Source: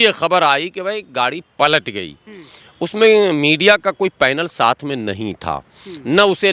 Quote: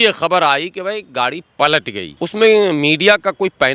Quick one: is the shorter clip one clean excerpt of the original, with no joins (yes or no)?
no